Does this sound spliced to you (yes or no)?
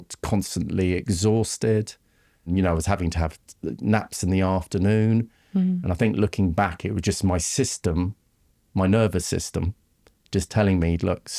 yes